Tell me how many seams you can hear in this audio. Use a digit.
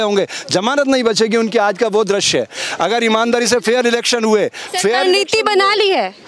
0